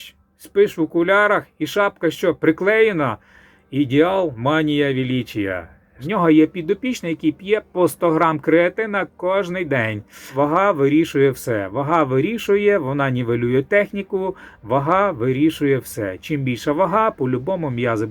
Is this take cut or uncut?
cut